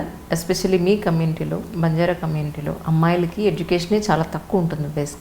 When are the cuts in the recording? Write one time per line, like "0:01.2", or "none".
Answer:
none